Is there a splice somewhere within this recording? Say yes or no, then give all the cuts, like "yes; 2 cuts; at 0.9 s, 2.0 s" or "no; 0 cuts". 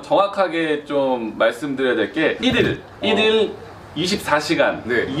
no; 0 cuts